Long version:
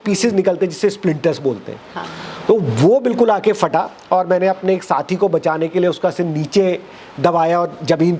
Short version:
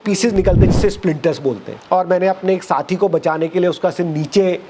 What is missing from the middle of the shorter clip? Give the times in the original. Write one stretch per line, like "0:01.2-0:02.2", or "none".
0:01.8-0:04.0